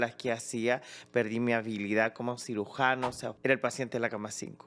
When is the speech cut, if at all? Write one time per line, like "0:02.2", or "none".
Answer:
0:03.3